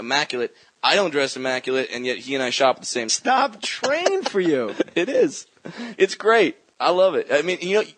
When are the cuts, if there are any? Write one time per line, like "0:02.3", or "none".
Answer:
none

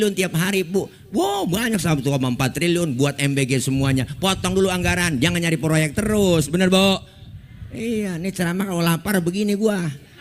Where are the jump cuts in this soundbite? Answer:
none

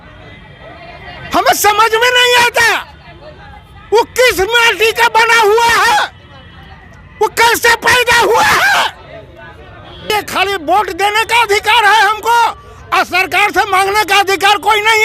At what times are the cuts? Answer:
0:10.1

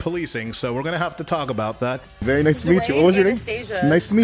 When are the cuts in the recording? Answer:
0:02.1

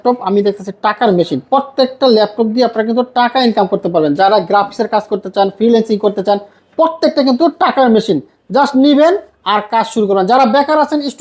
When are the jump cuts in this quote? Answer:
none

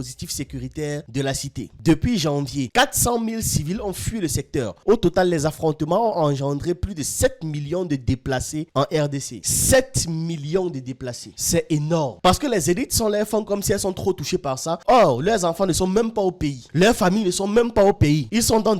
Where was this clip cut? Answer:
0:01.7
0:12.1

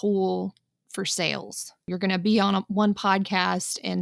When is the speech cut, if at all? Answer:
0:01.9

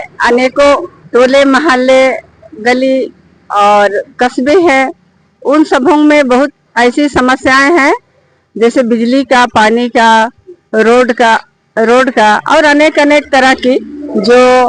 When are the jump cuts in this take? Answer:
0:00.9
0:06.6

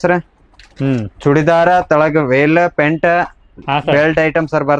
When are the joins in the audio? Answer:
none

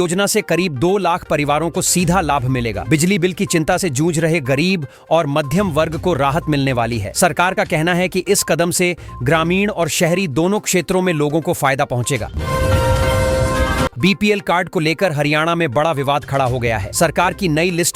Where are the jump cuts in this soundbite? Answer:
0:12.3
0:13.9

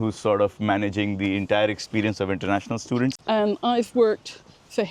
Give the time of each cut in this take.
0:03.2

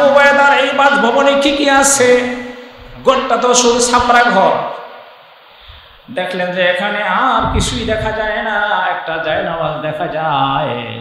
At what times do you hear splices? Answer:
none

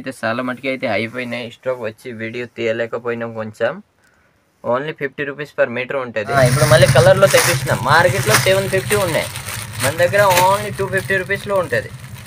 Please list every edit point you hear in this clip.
0:06.4

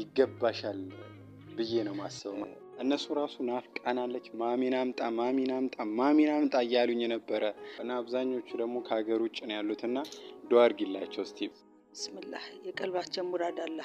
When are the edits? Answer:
0:02.4
0:07.8
0:11.6

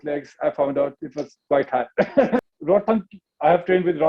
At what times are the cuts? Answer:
0:02.4

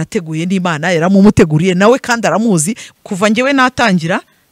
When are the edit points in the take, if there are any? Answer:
0:02.8

